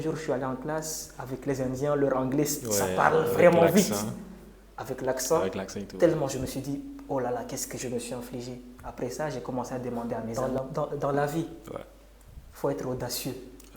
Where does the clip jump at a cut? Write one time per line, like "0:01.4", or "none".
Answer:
0:10.3